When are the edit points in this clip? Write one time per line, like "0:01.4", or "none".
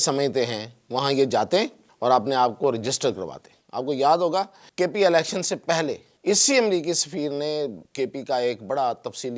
0:01.8
0:04.6
0:06.1
0:07.8